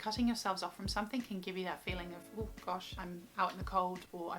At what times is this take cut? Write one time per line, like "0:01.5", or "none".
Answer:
0:02.9